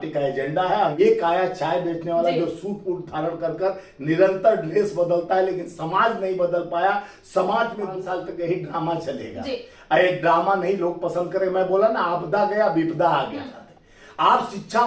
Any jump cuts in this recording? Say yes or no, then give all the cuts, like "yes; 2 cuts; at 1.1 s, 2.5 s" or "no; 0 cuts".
yes; 3 cuts; at 1.0 s, 8.0 s, 13.6 s